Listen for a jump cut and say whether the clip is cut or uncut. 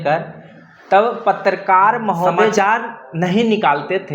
cut